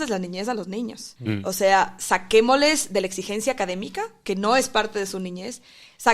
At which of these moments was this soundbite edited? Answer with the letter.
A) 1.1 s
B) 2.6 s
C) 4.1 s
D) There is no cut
A